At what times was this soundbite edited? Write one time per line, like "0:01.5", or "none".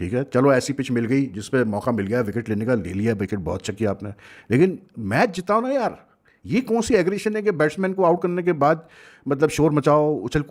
none